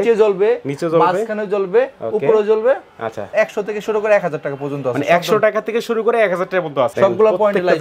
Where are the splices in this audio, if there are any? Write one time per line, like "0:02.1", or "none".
0:03.2
0:06.9